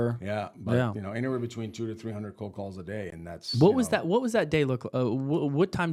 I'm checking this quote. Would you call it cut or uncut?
uncut